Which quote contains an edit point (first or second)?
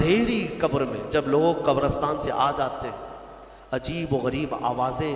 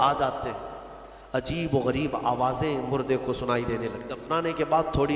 second